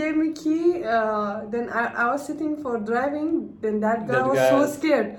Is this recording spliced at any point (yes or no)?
no